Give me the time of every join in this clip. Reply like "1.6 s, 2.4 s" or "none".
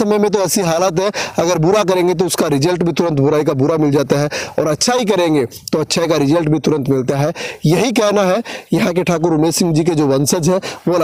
none